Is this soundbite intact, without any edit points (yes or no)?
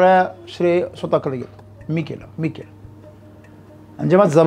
yes